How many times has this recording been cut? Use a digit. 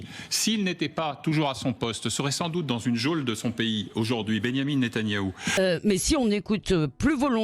1